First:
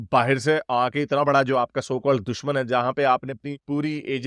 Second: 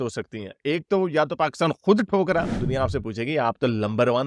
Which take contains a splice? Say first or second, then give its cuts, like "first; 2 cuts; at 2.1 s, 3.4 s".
second; 1 cut; at 2.5 s